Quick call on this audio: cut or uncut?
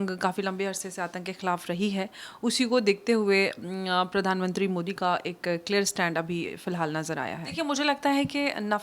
cut